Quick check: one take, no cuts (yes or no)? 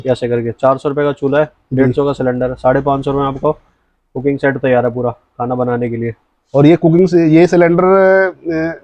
yes